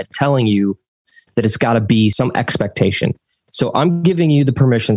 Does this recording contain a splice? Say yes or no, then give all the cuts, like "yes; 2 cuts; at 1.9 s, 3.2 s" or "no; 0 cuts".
yes; 1 cut; at 2.1 s